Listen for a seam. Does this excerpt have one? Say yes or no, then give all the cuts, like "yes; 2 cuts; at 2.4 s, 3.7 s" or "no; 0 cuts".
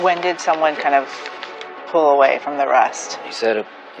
yes; 1 cut; at 3.1 s